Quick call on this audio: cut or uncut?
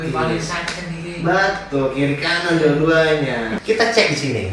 cut